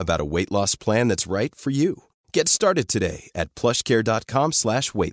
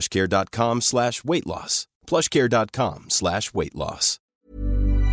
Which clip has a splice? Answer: second; 1 cut; at 4.1 s

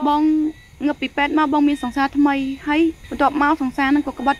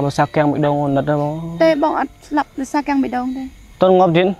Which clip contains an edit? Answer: first; 1 cut; at 3.0 s

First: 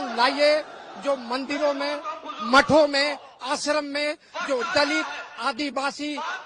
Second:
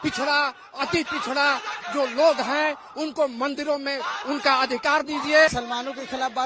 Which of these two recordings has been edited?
second; 1 cut; at 5.5 s

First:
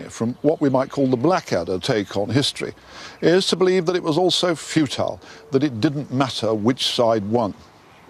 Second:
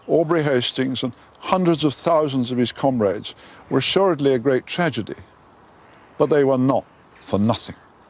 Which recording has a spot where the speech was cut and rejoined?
first; 1 cut; at 5.0 s

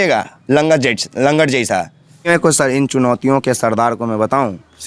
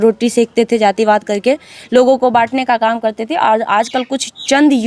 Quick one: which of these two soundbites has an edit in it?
first; 1 cut; at 2.3 s

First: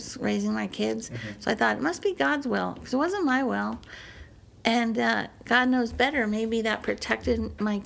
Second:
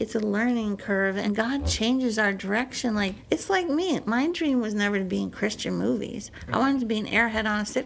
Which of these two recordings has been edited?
second; 2 cuts; at 1.2 s, 3.2 s

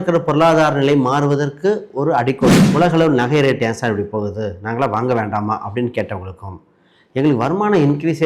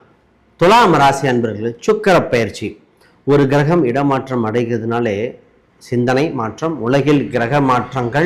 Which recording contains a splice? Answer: first; 1 cut; at 2.6 s

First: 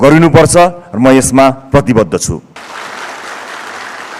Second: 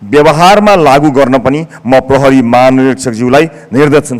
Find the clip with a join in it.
first; 1 cut; at 2.6 s

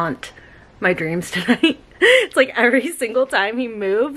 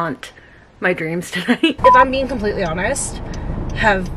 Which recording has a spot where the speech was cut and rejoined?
second; 1 cut; at 1.8 s

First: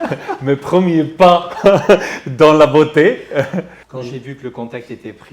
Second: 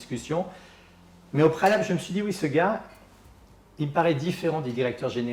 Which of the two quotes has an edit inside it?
first; 1 cut; at 3.7 s

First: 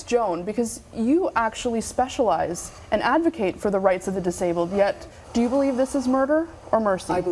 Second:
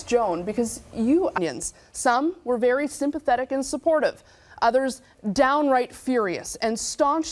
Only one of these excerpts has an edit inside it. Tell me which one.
first; 1 cut; at 1.4 s

